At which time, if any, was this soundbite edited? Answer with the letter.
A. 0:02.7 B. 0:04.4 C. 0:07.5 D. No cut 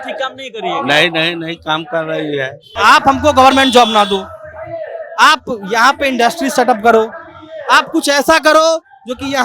A